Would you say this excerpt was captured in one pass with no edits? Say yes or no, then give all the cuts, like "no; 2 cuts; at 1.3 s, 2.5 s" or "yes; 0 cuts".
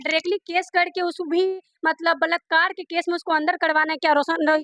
yes; 0 cuts